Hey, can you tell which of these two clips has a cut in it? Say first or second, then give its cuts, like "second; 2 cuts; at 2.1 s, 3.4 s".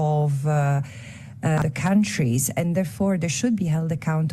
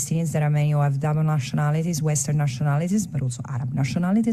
first; 1 cut; at 1.6 s